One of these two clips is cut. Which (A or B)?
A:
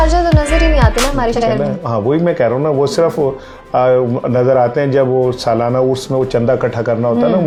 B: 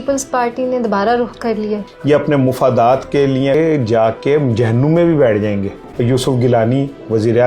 B